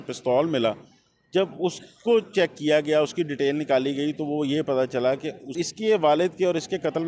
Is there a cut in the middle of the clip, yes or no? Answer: yes